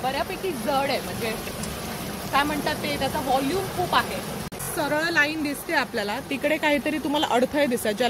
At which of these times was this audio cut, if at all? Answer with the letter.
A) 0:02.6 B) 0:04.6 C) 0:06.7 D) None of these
B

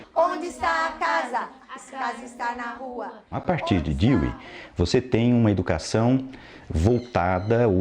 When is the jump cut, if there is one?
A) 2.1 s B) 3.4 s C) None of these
B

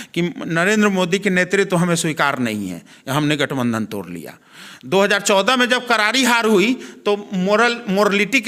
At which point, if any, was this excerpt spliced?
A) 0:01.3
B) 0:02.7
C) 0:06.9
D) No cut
D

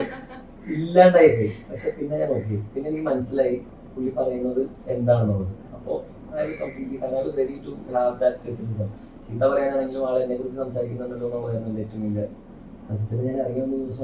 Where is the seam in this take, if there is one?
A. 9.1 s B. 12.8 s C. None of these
C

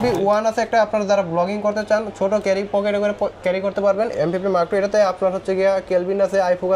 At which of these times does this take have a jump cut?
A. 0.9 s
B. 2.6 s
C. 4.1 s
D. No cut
C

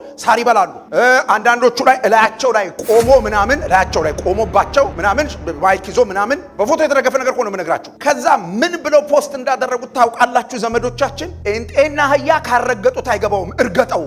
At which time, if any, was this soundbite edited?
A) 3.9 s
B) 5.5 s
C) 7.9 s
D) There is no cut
D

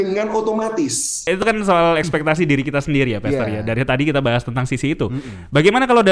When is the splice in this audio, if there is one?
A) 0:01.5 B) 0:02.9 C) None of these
A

